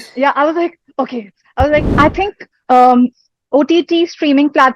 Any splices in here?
yes; 1 cut; at 1.9 s

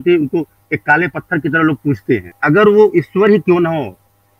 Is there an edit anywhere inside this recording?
yes; 1 cut; at 2.3 s

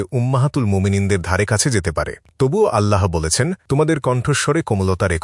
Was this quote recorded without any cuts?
yes; 0 cuts

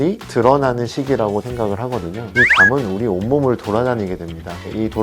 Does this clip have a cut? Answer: yes; 1 cut; at 2.3 s

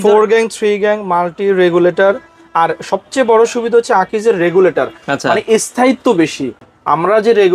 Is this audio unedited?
yes; 0 cuts

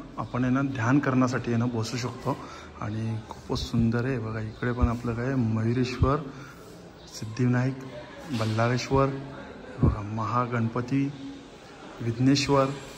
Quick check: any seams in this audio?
no; 0 cuts

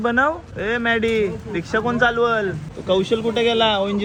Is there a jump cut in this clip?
no; 0 cuts

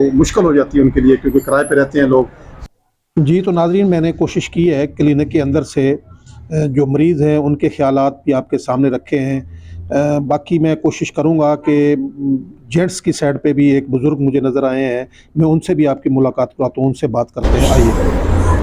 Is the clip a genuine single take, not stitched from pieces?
yes; 0 cuts

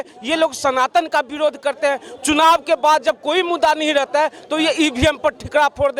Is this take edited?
no; 0 cuts

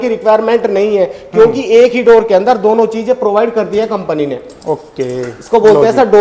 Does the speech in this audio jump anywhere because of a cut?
no; 0 cuts

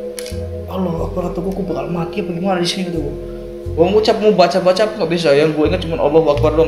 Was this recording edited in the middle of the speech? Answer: no; 0 cuts

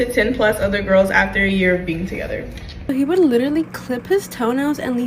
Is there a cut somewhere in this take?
yes; 1 cut; at 2.9 s

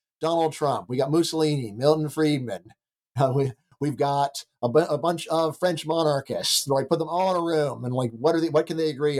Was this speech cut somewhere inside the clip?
no; 0 cuts

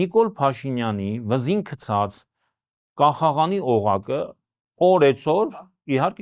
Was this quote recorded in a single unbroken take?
yes; 0 cuts

